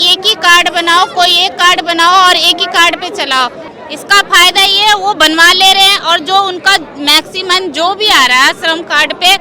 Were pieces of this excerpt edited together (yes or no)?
yes